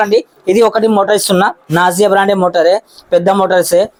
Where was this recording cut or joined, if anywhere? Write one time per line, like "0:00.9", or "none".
none